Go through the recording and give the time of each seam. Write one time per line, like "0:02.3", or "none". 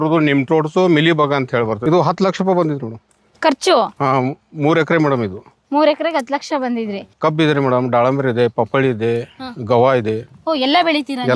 0:01.9
0:07.0